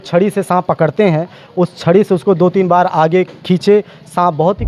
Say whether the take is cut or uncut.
uncut